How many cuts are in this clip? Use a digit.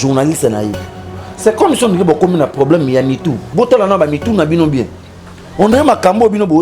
1